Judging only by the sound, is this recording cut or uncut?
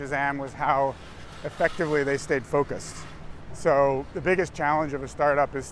uncut